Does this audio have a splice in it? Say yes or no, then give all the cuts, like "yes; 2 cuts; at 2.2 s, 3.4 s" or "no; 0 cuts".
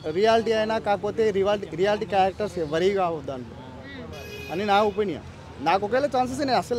no; 0 cuts